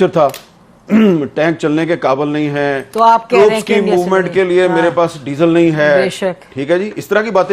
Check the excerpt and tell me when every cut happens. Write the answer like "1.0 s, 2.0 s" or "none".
none